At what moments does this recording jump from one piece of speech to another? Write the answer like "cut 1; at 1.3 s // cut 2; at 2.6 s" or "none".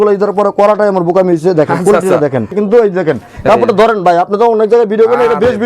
cut 1; at 2.5 s

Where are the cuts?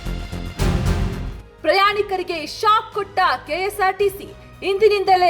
cut 1; at 1.4 s

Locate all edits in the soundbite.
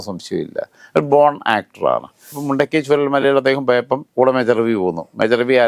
cut 1; at 2.3 s

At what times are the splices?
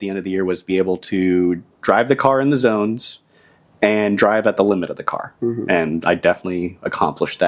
none

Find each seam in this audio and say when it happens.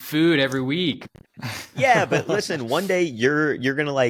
none

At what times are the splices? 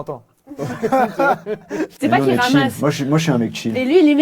cut 1; at 1.9 s

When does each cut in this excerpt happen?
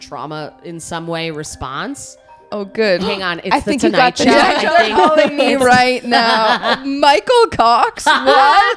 none

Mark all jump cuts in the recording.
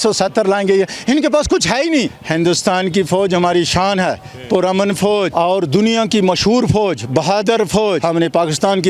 cut 1; at 2.2 s // cut 2; at 5.3 s // cut 3; at 8.0 s

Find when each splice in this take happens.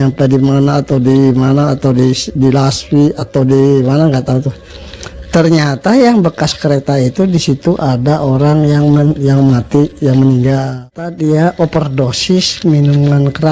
cut 1; at 11.1 s

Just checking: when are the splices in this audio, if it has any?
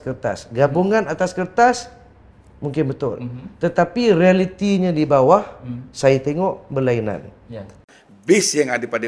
cut 1; at 7.9 s

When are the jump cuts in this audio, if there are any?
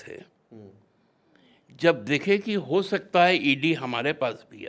none

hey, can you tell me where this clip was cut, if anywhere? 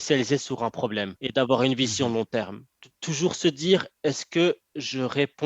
cut 1; at 1.2 s

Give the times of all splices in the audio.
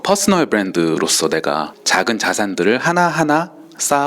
cut 1; at 1.8 s

